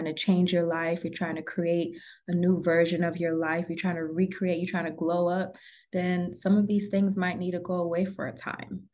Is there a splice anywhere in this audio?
no; 0 cuts

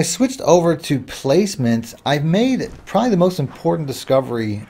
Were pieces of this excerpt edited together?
no; 0 cuts

